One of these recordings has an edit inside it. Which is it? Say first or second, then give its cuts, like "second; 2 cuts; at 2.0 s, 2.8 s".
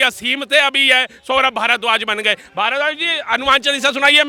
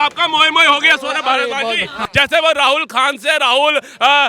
second; 1 cut; at 2.0 s